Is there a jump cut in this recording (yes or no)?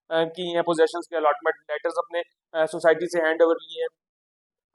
no